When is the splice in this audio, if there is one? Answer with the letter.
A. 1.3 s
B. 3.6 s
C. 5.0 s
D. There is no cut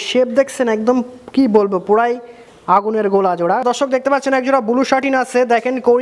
B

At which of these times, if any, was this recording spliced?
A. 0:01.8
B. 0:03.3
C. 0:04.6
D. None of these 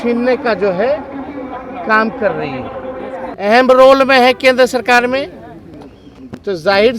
B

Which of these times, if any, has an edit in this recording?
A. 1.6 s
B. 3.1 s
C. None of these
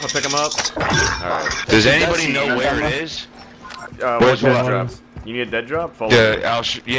A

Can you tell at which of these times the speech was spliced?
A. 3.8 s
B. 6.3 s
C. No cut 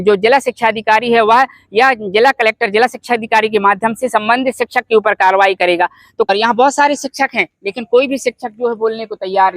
B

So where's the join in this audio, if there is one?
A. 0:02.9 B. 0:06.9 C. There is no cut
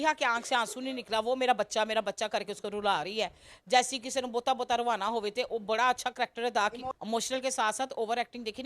B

